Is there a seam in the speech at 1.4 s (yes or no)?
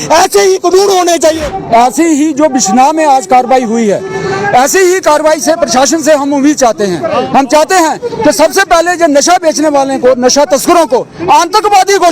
yes